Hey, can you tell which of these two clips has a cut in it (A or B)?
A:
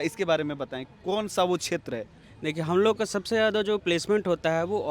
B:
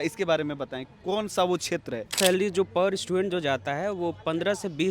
B